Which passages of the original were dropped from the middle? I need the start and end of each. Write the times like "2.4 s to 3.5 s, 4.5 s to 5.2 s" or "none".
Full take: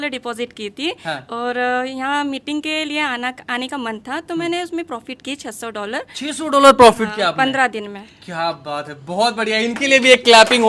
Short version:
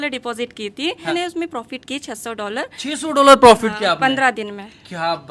1.1 s to 4.5 s